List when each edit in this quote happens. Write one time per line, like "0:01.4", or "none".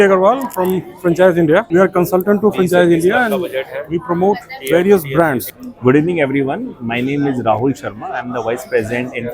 0:01.7
0:05.6